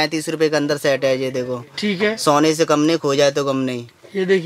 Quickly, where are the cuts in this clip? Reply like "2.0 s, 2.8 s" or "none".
none